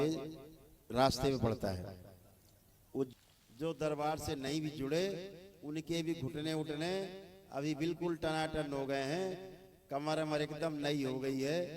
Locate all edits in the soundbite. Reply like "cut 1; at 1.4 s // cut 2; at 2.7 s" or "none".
cut 1; at 3.1 s